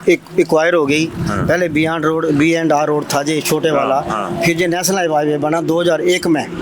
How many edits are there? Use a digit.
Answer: 0